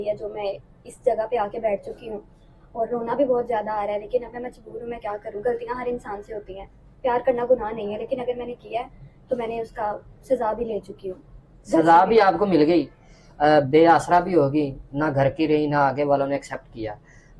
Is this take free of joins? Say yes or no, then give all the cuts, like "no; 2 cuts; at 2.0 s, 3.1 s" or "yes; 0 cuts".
yes; 0 cuts